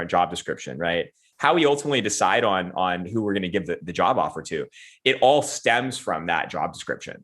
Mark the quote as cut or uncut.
cut